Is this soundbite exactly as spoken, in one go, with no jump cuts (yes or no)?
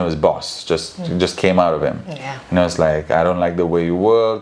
yes